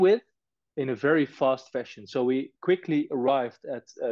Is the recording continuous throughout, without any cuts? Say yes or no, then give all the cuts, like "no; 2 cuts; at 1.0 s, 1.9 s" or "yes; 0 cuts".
yes; 0 cuts